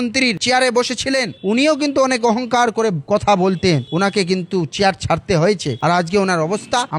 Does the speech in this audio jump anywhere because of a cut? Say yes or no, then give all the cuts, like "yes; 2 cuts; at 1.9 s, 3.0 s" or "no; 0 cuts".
no; 0 cuts